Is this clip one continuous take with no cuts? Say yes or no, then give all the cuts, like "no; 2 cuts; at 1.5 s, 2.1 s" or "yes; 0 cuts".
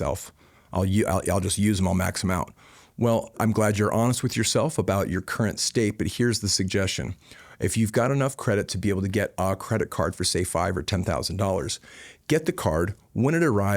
no; 1 cut; at 3.4 s